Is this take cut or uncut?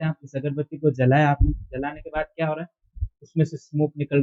uncut